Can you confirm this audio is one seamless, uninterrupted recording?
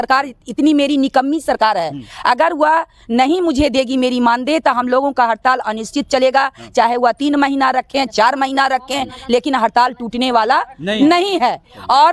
yes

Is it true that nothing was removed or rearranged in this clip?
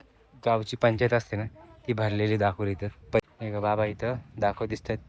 no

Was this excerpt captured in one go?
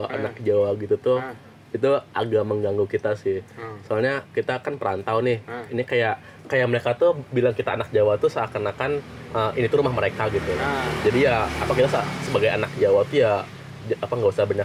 yes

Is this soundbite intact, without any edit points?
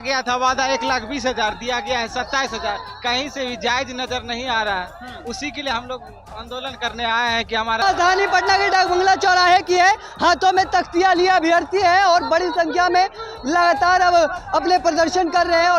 no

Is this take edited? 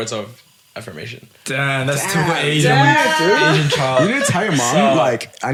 no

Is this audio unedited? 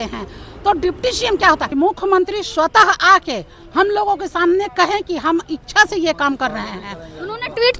no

